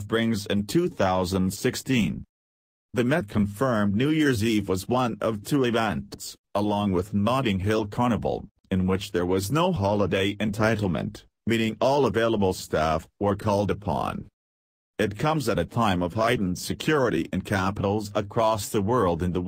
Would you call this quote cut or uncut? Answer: cut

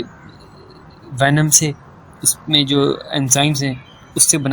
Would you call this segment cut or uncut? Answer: uncut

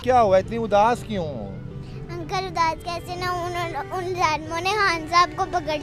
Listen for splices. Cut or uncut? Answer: uncut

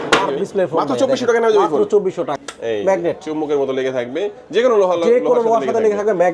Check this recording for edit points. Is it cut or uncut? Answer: cut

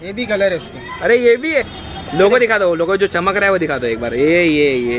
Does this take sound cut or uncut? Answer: cut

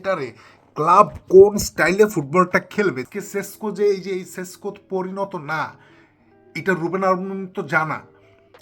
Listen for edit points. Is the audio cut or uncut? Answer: cut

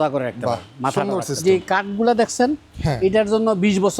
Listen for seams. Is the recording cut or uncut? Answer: cut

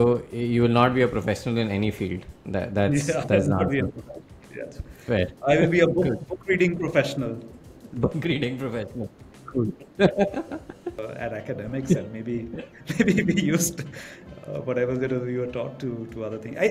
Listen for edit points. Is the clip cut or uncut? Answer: cut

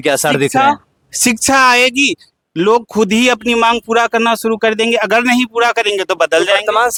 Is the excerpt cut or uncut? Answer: uncut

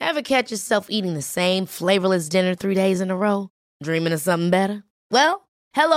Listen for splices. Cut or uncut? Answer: uncut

